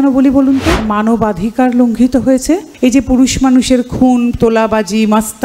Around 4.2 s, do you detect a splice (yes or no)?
no